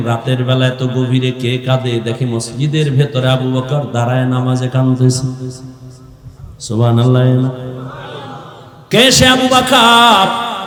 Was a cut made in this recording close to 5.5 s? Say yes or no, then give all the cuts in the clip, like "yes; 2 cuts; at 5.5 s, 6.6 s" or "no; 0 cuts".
no; 0 cuts